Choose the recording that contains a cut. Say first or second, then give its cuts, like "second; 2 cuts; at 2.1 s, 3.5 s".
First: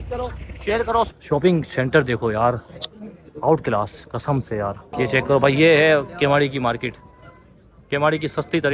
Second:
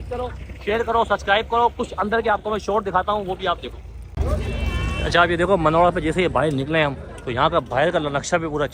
first; 2 cuts; at 1.1 s, 4.9 s